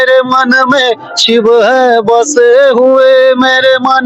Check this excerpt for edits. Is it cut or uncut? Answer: uncut